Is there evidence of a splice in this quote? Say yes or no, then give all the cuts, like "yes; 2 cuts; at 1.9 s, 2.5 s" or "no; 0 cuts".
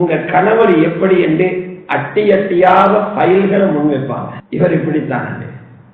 yes; 1 cut; at 4.6 s